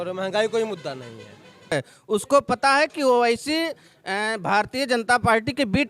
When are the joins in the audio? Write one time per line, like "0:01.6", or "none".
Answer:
0:01.7

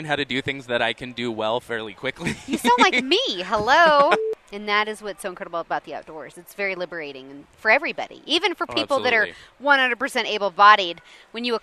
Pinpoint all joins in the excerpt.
0:04.2

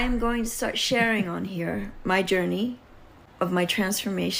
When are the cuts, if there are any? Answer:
none

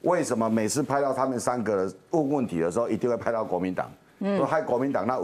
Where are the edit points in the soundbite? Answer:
none

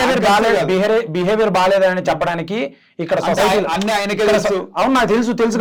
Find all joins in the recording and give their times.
none

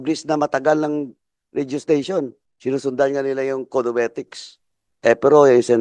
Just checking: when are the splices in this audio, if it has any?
0:02.4

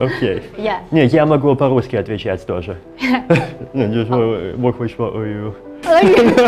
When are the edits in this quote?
none

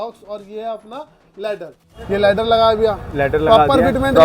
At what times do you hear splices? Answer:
0:01.9

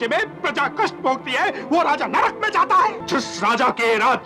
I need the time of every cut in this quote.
0:03.0

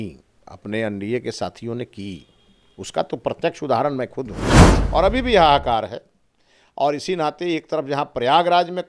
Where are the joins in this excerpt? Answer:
0:04.4

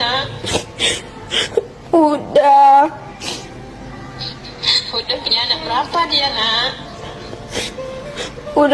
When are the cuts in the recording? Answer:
none

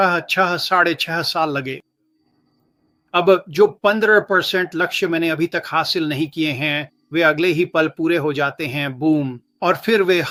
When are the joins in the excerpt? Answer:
none

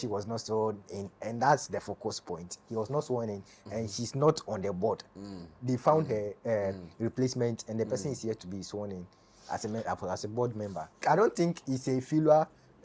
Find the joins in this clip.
0:11.0

